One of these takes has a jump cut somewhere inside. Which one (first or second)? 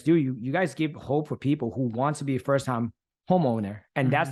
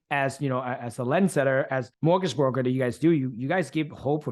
second